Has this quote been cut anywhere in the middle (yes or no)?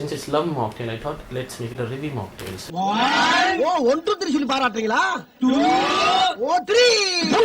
no